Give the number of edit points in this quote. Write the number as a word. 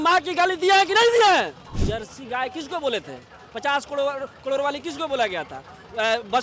one